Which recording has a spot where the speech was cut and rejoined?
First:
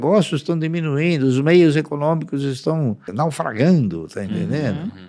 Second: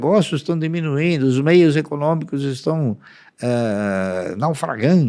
first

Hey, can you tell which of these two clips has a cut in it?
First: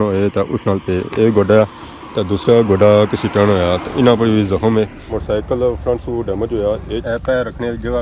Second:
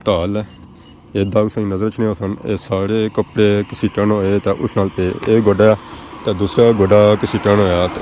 first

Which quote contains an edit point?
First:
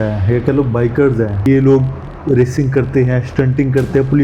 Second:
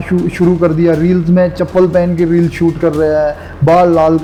first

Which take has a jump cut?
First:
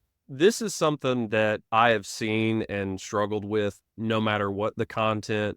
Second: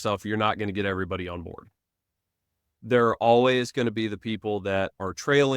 first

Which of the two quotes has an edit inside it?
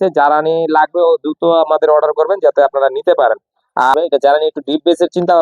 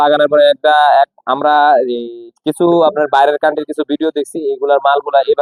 first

